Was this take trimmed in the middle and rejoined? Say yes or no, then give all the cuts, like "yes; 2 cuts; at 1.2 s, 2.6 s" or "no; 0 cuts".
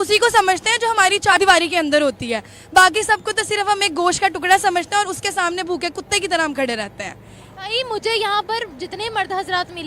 yes; 1 cut; at 1.3 s